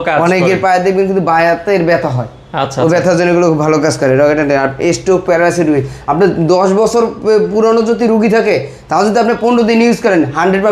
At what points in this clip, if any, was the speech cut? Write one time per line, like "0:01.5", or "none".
none

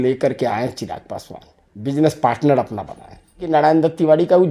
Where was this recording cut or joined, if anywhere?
0:03.4

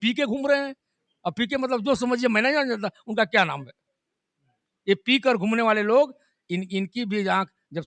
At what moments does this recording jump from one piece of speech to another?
none

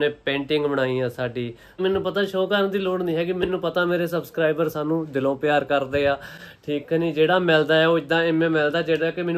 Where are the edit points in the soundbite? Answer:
0:01.7

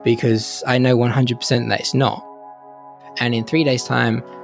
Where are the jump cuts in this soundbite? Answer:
0:02.8

